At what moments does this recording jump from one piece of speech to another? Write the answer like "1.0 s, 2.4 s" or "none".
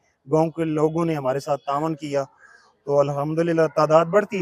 none